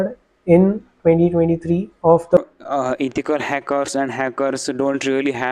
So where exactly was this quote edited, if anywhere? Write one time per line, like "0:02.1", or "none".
0:02.4